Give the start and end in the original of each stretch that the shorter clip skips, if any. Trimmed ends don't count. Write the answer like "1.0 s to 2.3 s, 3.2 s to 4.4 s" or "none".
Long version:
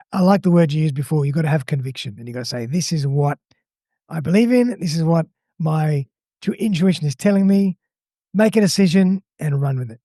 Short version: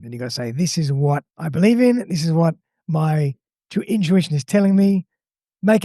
3.5 s to 4.1 s

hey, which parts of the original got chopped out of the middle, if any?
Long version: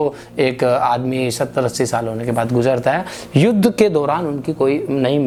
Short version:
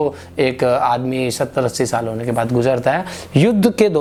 none

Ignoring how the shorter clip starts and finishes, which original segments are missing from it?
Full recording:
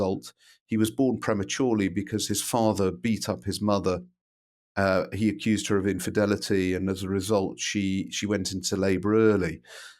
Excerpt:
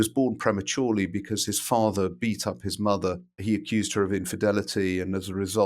4.2 s to 5.1 s

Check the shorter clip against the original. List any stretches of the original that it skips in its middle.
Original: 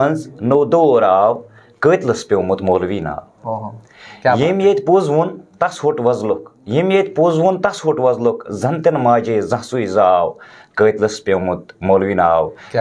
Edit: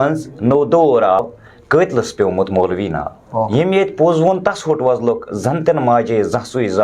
1.2 s to 1.3 s, 3.6 s to 6.7 s

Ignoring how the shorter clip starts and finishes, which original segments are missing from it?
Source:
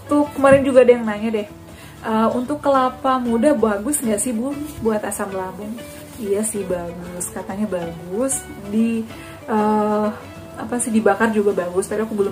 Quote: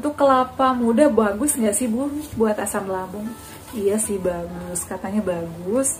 none

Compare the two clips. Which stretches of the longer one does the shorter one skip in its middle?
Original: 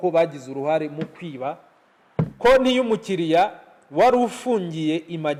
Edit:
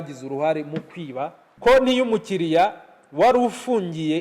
1.8 s to 2.3 s

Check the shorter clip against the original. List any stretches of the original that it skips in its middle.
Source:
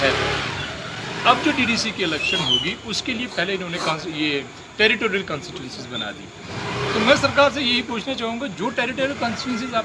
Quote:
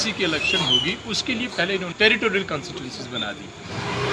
3.7 s to 4.7 s

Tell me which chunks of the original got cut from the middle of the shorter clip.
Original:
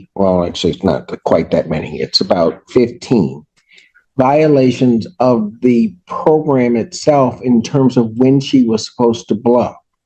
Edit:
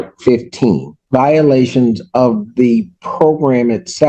3.4 s to 4.0 s

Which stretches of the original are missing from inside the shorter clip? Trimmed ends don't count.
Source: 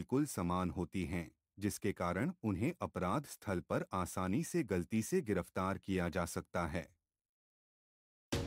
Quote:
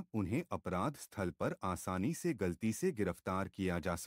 none

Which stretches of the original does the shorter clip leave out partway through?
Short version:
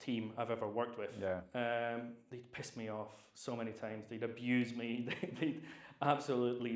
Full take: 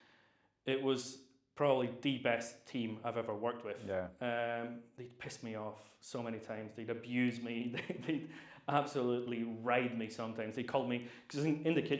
none

